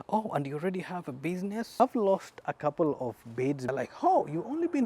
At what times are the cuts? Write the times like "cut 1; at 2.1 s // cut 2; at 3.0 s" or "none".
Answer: cut 1; at 1.8 s // cut 2; at 3.7 s

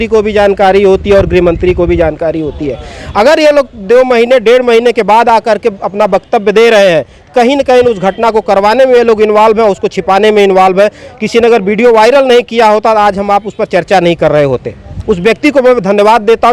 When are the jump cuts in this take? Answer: none

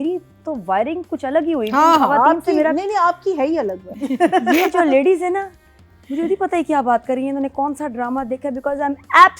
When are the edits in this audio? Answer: cut 1; at 3.8 s

